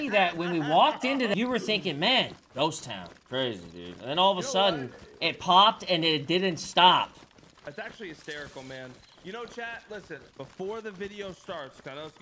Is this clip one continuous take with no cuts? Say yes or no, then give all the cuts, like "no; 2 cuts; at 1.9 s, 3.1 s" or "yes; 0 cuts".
no; 2 cuts; at 1.3 s, 7.7 s